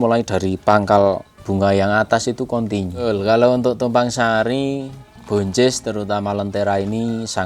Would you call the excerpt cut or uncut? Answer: cut